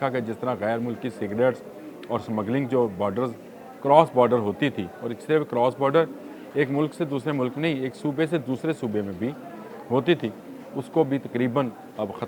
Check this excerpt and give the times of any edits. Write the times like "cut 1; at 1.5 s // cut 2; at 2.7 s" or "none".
none

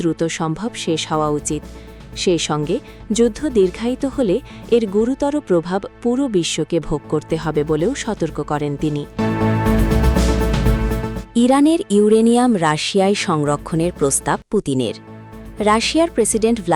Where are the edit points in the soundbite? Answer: cut 1; at 9.1 s // cut 2; at 11.2 s

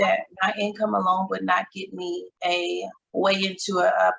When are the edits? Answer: cut 1; at 2.5 s

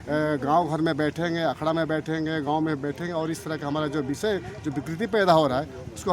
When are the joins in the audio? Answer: none

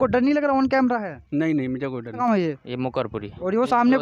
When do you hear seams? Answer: cut 1; at 2.2 s

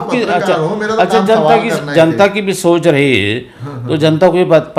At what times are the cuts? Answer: none

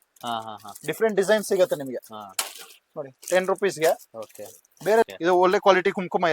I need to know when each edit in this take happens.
cut 1; at 5.1 s

